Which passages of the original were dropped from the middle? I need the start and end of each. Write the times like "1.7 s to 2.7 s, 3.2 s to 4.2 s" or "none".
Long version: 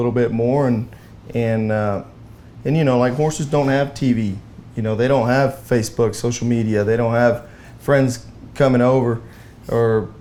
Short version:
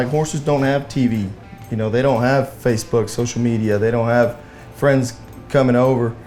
none